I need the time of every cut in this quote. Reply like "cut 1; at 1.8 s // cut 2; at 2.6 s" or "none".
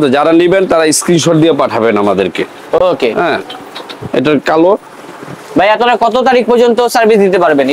none